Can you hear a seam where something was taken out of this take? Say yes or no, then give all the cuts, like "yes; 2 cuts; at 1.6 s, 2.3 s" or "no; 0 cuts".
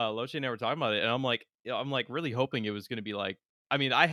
no; 0 cuts